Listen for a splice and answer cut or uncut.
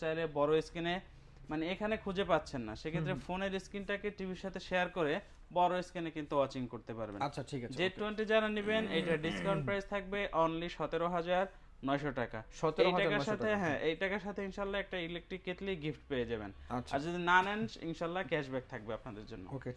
uncut